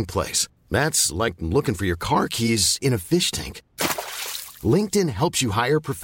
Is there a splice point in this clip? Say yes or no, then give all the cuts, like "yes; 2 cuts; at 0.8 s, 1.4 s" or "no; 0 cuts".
no; 0 cuts